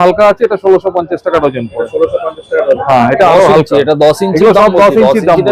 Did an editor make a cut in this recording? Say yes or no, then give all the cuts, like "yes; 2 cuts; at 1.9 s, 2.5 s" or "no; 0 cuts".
no; 0 cuts